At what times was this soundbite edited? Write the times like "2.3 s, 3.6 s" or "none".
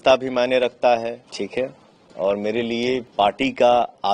1.2 s, 3.1 s